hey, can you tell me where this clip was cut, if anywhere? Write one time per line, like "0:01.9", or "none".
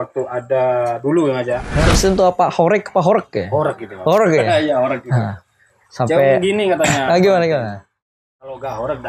0:01.9

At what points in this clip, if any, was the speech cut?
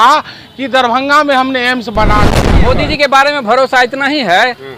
0:02.4

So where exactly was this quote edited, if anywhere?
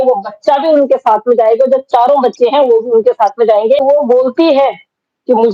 0:03.8

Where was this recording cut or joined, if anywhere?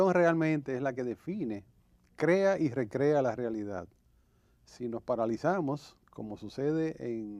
0:02.7

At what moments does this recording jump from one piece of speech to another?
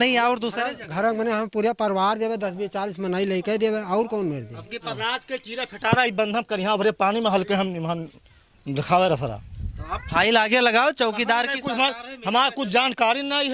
0:04.9

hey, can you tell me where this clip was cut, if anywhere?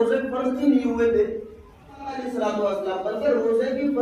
0:02.2

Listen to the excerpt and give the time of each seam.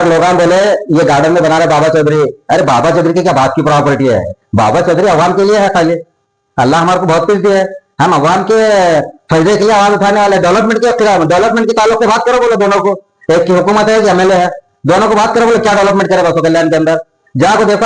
none

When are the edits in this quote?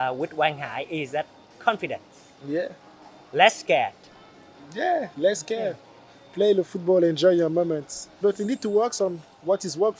0:08.2

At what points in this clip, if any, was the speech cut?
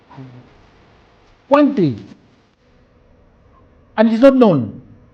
none

